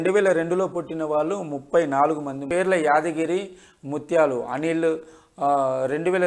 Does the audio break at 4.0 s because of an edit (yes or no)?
no